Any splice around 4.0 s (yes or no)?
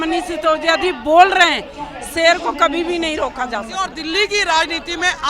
yes